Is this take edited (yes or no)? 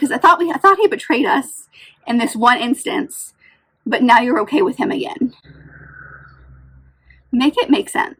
no